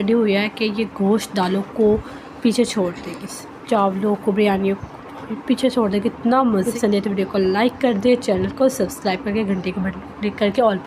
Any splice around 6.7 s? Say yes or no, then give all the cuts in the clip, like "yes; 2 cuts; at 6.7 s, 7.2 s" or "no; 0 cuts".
yes; 1 cut; at 6.7 s